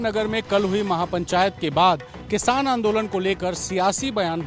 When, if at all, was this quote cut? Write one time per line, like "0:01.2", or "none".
none